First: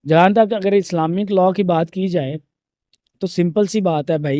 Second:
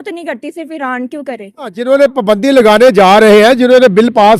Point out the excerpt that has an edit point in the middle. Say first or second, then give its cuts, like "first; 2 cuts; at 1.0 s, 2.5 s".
second; 1 cut; at 1.9 s